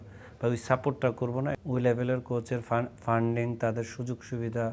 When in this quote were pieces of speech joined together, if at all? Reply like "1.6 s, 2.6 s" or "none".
1.6 s